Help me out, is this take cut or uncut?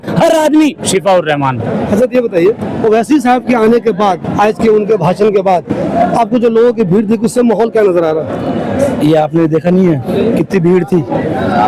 uncut